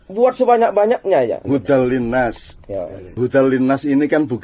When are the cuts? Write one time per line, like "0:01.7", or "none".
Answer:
0:01.4
0:03.2